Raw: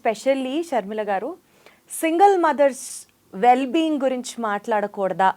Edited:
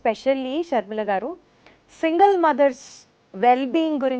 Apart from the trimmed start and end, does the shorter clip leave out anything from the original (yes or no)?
no